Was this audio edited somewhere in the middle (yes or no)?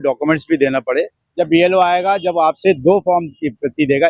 yes